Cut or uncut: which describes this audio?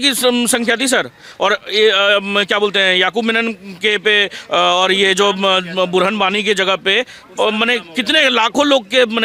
uncut